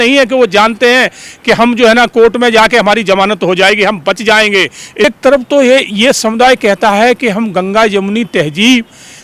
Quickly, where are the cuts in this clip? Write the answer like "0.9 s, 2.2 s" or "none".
5.0 s